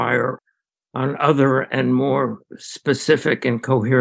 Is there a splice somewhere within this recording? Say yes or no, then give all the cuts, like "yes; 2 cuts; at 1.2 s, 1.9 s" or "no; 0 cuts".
no; 0 cuts